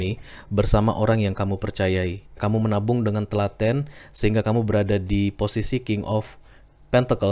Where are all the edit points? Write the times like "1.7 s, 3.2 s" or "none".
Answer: 2.4 s